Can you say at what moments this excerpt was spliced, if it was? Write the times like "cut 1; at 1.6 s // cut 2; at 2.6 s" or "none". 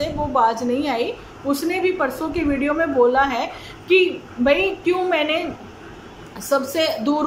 none